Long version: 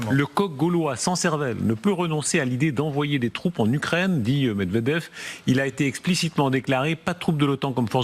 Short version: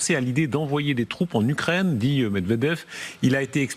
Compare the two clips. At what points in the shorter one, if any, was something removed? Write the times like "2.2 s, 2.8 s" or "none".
none